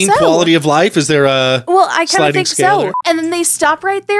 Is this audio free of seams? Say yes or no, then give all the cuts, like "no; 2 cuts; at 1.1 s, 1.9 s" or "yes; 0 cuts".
no; 2 cuts; at 1.6 s, 3.0 s